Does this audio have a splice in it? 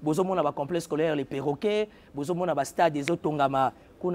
no; 0 cuts

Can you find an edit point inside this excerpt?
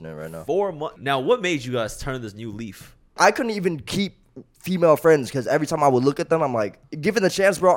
yes; 3 cuts; at 1.0 s, 3.2 s, 6.8 s

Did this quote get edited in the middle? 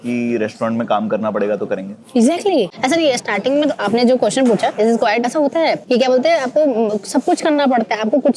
yes; 1 cut; at 2.7 s

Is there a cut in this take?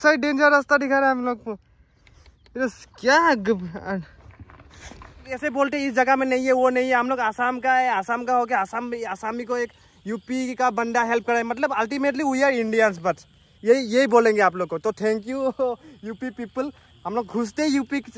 yes; 1 cut; at 5.4 s

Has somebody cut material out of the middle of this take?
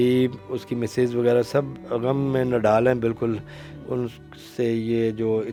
no; 0 cuts

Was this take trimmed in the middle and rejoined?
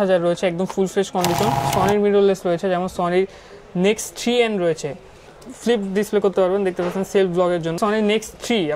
yes; 3 cuts; at 1.7 s, 5.3 s, 7.8 s

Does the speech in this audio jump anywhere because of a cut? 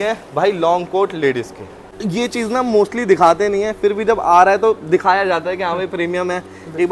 yes; 1 cut; at 1.9 s

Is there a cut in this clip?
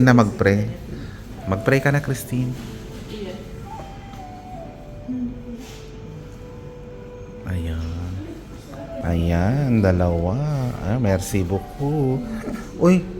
yes; 1 cut; at 9.0 s

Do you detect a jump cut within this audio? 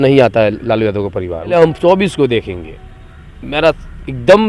yes; 1 cut; at 1.5 s

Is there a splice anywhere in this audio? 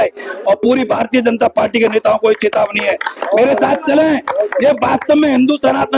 no; 0 cuts

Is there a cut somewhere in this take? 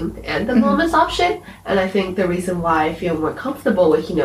yes; 1 cut; at 1.5 s

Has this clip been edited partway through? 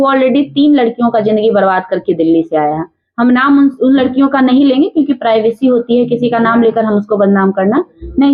no; 0 cuts

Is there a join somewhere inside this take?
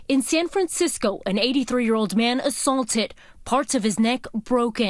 no; 0 cuts

